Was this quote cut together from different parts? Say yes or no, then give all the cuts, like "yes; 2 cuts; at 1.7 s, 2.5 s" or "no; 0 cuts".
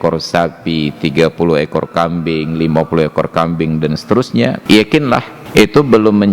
yes; 2 cuts; at 4.6 s, 5.4 s